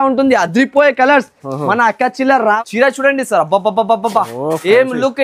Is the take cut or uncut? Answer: cut